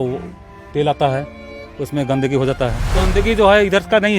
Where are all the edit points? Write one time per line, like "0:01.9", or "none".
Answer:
0:03.0